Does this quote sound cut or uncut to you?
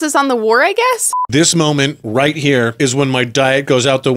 cut